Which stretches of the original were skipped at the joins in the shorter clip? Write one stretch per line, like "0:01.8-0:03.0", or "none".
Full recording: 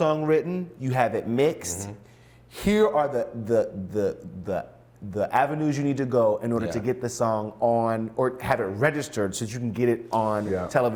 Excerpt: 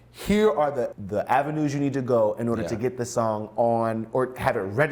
0:03.3-0:05.0